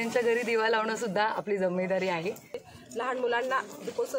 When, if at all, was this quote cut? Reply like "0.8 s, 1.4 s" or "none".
2.7 s

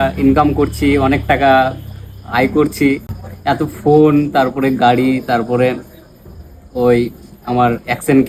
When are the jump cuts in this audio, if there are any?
none

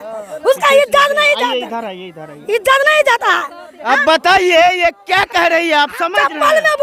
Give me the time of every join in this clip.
none

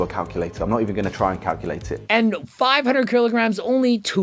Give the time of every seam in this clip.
2.0 s

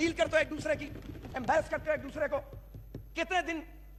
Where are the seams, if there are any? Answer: none

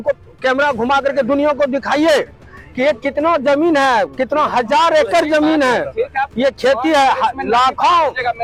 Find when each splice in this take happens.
none

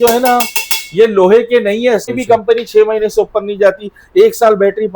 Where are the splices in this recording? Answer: 2.1 s

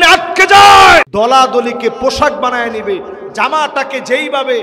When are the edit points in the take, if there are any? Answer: 1.1 s

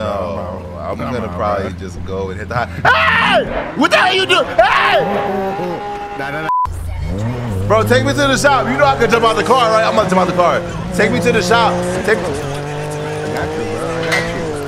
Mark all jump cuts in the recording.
6.5 s

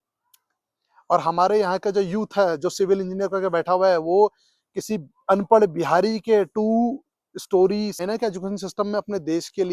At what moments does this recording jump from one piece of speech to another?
8.0 s

